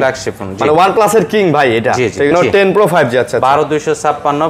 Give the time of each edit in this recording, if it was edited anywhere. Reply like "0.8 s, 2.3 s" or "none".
2.3 s